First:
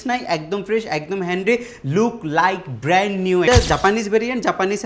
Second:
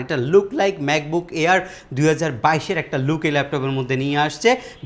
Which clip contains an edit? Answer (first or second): first